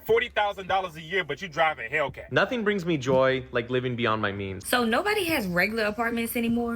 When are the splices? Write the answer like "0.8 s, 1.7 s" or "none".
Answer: 2.3 s, 4.6 s